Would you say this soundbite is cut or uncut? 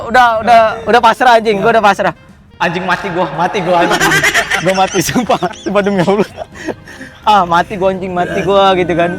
uncut